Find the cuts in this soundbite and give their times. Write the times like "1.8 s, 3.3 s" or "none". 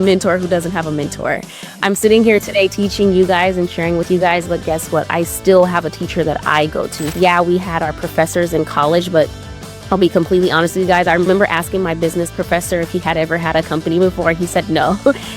7.1 s